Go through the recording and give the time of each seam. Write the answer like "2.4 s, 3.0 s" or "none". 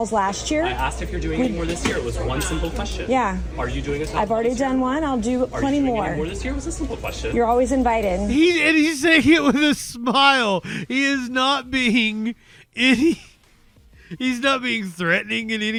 none